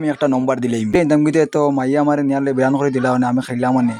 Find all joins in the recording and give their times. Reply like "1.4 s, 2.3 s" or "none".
1.0 s